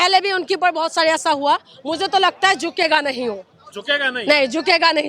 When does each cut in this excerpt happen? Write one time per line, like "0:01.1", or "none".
none